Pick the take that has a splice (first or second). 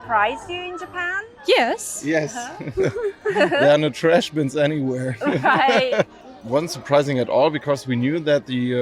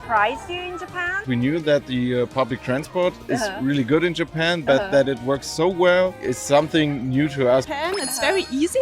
second